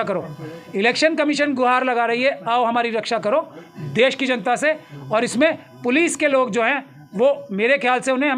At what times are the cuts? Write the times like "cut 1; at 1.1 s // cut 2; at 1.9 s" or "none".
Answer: none